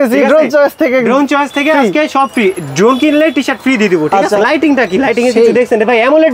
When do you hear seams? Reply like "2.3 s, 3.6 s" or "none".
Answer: 4.4 s